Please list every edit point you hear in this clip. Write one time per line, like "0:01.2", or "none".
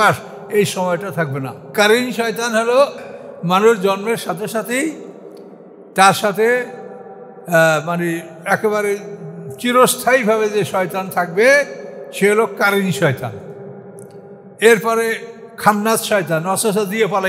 0:01.7
0:03.0